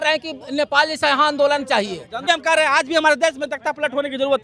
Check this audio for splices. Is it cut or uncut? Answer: cut